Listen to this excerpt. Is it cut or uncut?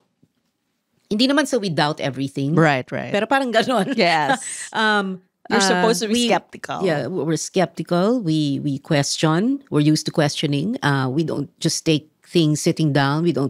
uncut